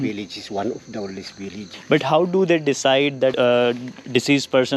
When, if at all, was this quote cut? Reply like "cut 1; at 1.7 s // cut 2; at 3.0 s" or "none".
cut 1; at 1.6 s // cut 2; at 3.3 s

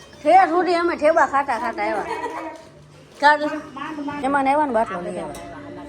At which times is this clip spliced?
cut 1; at 4.2 s

